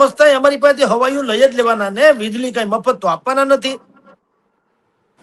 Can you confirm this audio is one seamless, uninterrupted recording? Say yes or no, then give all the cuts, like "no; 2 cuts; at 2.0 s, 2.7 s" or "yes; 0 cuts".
yes; 0 cuts